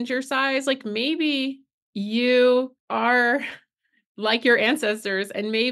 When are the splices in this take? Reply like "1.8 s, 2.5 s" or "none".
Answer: 2.8 s